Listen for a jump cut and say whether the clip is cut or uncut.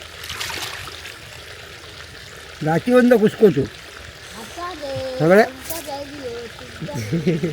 uncut